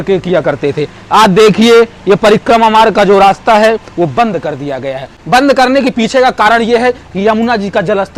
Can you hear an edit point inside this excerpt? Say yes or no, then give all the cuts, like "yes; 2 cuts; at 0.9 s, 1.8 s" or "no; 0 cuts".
no; 0 cuts